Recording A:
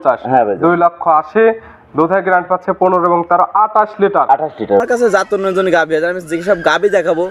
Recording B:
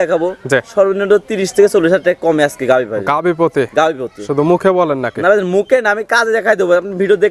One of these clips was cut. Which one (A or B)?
A